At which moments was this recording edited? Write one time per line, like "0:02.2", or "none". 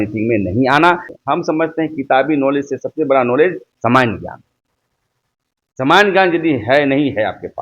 0:01.1